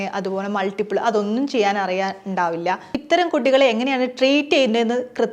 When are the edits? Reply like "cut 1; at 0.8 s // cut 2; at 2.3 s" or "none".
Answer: cut 1; at 2.9 s